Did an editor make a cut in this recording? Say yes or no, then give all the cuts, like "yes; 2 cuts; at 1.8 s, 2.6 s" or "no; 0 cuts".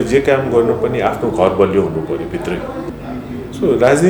yes; 1 cut; at 2.8 s